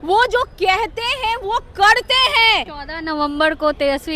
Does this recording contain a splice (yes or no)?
yes